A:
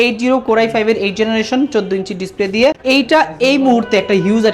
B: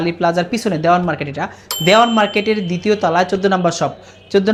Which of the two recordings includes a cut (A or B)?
A